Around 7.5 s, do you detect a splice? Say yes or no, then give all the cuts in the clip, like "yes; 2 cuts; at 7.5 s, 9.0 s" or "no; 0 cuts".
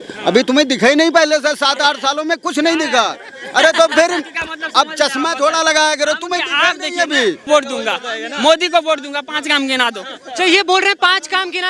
yes; 1 cut; at 7.5 s